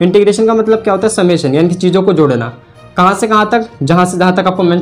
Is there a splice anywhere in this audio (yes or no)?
no